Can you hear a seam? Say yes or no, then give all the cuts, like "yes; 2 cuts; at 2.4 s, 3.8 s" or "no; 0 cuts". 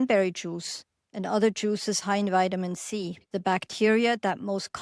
yes; 1 cut; at 3.2 s